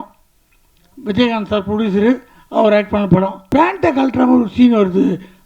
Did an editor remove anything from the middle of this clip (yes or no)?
yes